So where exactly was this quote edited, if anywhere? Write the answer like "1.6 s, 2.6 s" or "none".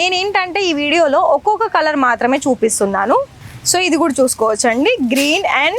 3.4 s

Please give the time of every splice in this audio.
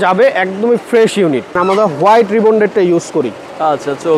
1.5 s

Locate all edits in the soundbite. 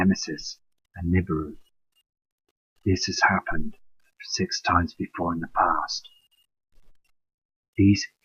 none

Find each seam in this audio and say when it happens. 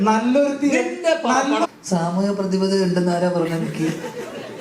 1.7 s

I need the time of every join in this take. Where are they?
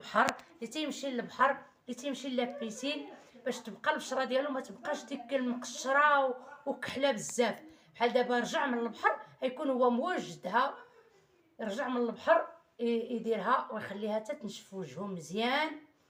none

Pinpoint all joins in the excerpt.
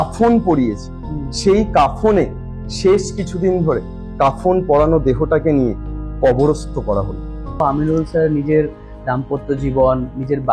7.6 s

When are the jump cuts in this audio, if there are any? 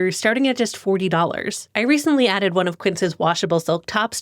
1.6 s

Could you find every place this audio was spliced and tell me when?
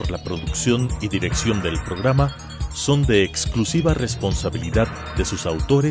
none

